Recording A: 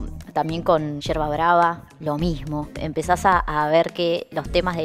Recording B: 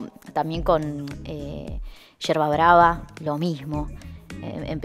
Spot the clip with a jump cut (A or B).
A